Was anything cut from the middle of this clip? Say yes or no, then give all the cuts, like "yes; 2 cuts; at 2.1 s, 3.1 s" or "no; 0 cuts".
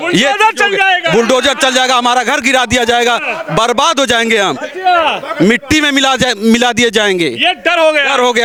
no; 0 cuts